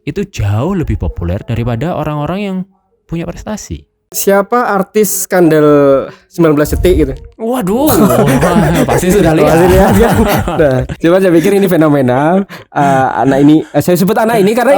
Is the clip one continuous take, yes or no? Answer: no